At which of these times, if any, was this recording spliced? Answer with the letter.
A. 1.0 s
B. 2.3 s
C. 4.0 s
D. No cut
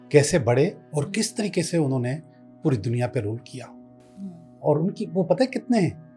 D